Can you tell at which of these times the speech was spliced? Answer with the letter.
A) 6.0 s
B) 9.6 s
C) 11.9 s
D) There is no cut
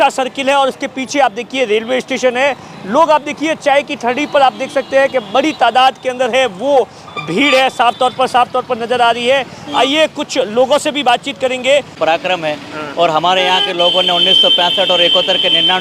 C